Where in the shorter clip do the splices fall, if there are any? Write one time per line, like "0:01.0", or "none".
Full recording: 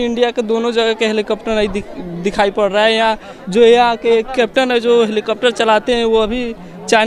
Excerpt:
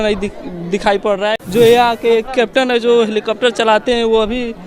0:01.3